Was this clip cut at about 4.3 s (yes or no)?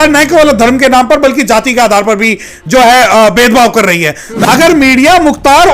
yes